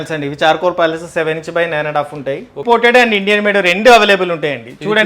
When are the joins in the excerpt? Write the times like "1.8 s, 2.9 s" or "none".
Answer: 2.6 s